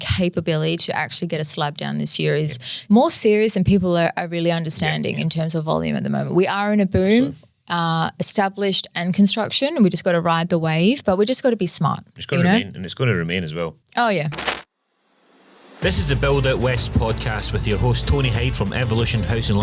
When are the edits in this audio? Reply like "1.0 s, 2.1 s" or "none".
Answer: 2.7 s, 13.8 s, 14.6 s